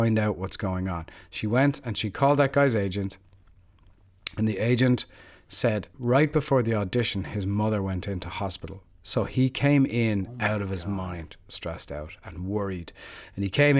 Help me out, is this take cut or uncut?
uncut